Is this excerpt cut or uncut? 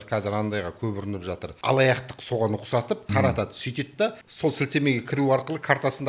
cut